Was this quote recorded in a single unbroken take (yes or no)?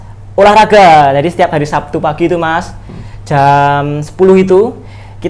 yes